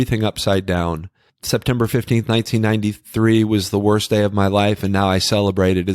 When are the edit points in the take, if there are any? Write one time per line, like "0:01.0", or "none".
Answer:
0:01.3

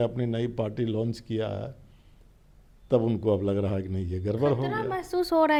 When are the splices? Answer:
none

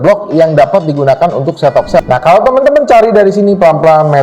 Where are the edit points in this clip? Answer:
0:02.0

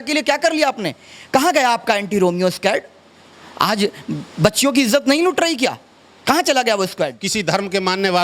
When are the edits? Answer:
0:07.3

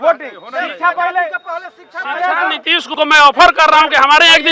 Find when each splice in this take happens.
0:02.8

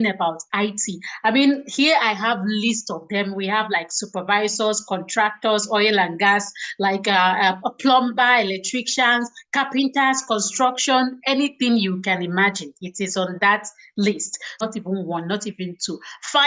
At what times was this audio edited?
0:14.5

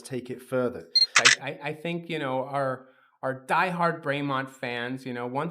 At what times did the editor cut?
0:01.1

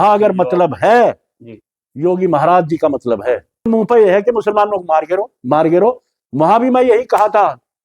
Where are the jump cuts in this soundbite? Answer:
0:03.7

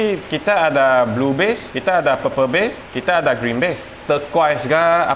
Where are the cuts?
0:01.7
0:02.9
0:03.9

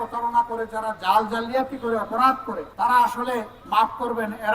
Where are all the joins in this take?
0:02.6
0:03.6

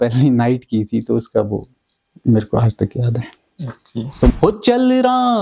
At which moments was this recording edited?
0:04.3

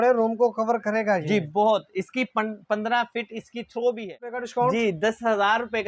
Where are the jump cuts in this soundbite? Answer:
0:04.4

